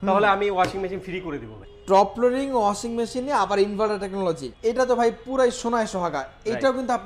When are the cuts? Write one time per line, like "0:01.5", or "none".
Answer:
0:01.6
0:04.5